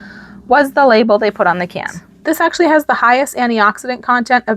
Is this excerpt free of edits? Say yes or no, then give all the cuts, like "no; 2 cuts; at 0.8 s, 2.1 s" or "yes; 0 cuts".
no; 1 cut; at 2.2 s